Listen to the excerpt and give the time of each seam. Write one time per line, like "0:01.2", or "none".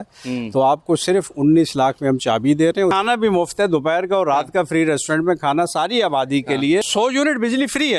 0:02.9
0:06.9